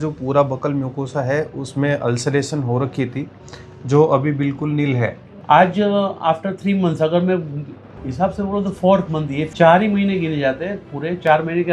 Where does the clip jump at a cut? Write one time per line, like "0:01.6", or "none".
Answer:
0:05.3
0:09.5